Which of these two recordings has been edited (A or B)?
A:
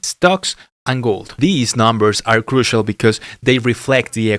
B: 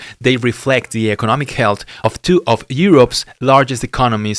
A